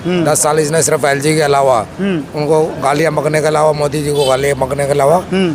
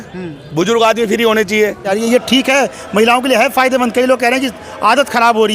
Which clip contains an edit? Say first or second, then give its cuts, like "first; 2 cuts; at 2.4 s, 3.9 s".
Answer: second; 1 cut; at 1.9 s